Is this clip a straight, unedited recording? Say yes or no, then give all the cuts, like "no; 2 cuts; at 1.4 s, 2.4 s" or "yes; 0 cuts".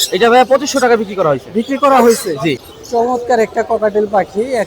no; 1 cut; at 2.6 s